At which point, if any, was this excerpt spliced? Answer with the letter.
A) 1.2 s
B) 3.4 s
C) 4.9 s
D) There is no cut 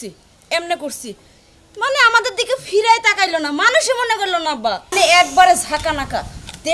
C